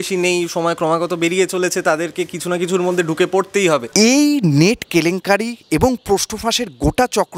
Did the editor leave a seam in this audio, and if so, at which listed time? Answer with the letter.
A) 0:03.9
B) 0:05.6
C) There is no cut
A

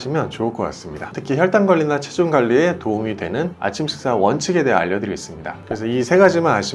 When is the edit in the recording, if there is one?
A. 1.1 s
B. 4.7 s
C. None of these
A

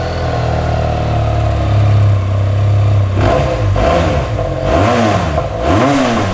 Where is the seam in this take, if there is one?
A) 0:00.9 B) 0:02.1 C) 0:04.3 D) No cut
D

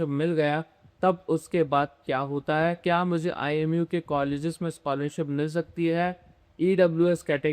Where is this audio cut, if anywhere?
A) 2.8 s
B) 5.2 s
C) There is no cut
A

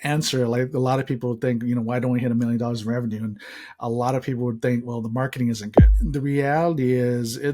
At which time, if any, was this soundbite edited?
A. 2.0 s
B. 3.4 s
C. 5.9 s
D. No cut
C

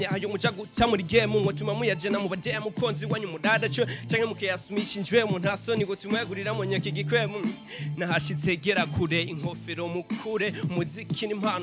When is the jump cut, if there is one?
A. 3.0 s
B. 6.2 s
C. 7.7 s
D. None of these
D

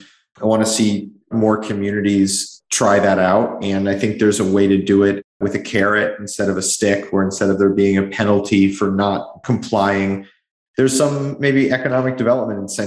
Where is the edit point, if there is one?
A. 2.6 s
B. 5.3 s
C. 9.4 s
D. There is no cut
B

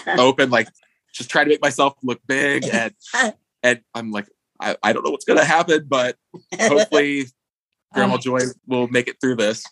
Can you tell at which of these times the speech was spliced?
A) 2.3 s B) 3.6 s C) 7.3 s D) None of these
D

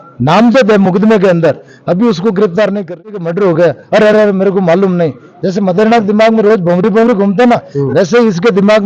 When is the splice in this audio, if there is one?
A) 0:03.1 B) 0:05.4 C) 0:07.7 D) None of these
A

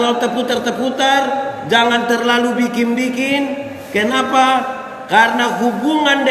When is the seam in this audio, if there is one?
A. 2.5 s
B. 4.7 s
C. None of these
C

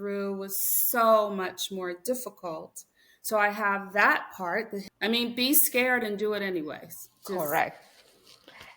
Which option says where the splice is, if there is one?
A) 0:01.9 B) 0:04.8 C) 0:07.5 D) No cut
B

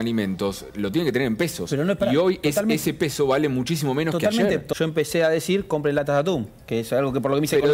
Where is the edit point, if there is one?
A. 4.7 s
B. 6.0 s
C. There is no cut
A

